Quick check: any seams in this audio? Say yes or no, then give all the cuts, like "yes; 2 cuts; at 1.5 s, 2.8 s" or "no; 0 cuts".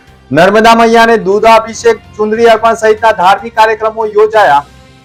no; 0 cuts